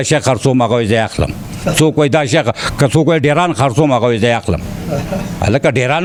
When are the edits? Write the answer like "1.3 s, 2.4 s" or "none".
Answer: none